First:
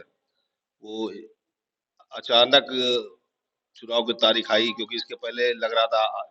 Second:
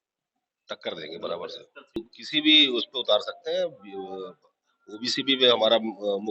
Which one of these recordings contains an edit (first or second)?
second